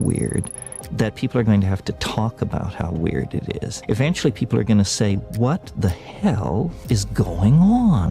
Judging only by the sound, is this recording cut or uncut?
cut